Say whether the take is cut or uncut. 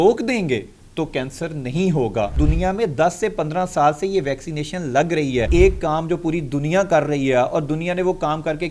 cut